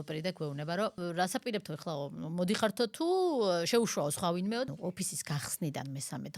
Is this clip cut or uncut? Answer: cut